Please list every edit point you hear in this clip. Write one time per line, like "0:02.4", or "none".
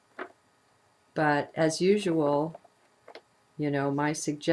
0:01.4